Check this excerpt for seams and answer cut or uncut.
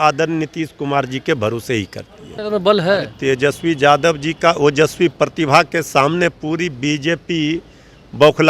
cut